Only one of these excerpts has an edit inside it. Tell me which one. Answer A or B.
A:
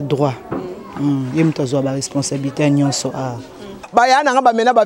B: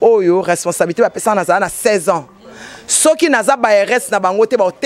A